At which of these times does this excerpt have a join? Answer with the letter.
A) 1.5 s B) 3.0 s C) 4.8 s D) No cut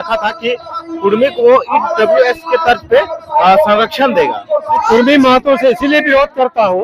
C